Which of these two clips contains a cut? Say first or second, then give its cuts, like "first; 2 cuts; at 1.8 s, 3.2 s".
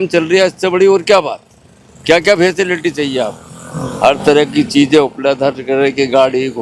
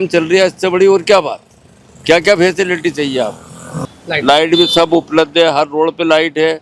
second; 1 cut; at 3.8 s